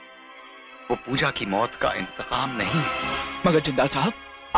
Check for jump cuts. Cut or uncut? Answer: uncut